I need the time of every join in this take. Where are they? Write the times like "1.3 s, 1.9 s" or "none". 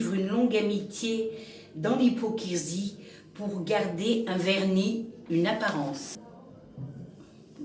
6.2 s